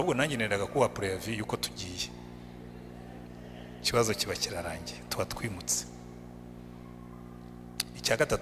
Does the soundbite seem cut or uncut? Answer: uncut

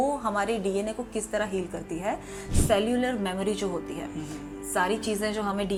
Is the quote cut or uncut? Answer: uncut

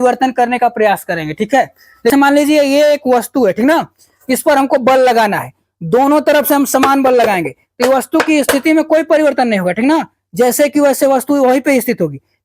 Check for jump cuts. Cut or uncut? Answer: cut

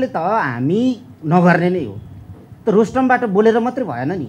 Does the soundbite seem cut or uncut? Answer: uncut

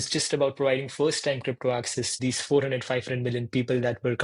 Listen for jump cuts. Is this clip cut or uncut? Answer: cut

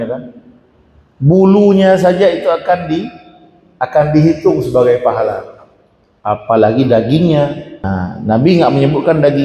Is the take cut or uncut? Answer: cut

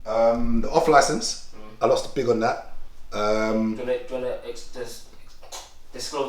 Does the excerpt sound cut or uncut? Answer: uncut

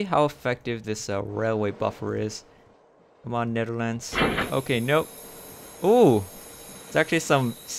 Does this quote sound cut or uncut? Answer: uncut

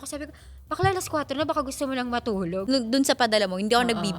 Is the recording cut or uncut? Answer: cut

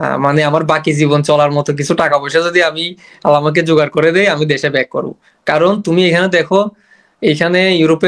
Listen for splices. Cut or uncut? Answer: uncut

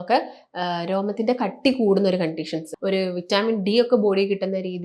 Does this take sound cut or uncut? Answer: cut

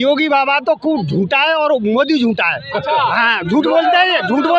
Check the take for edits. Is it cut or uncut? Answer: uncut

